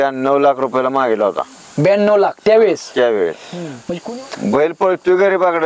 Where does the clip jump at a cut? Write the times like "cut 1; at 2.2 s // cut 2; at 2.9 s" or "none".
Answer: cut 1; at 3.8 s